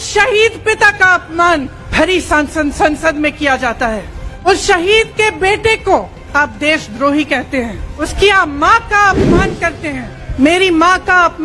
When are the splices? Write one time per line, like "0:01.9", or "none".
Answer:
0:01.8
0:04.5
0:06.2
0:08.0
0:10.2